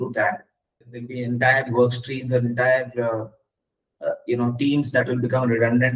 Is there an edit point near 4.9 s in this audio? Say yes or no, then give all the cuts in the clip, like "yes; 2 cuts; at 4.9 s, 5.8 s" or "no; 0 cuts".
no; 1 cut; at 1.1 s